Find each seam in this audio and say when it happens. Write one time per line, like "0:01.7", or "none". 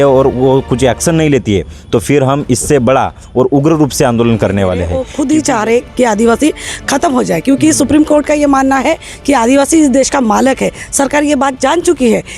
0:05.0